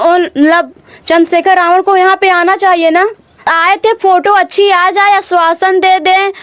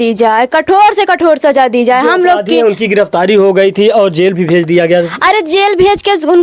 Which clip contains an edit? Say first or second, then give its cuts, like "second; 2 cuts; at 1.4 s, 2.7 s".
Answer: first; 1 cut; at 3.5 s